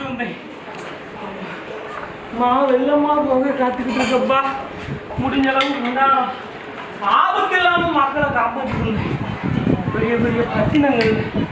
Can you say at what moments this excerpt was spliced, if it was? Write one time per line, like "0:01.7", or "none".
none